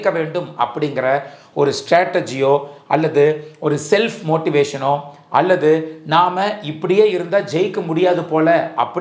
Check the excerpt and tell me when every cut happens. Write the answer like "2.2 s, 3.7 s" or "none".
none